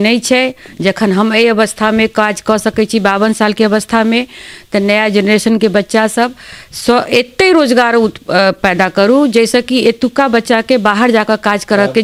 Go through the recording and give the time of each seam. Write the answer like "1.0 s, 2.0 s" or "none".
none